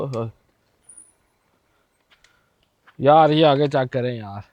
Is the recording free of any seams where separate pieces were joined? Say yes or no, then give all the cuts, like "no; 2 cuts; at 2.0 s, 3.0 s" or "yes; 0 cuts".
yes; 0 cuts